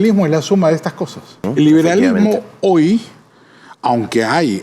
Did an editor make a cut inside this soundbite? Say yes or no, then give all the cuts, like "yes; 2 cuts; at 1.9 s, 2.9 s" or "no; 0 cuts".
yes; 1 cut; at 1.4 s